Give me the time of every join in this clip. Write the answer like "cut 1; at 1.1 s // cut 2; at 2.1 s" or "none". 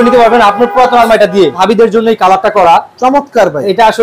cut 1; at 1.6 s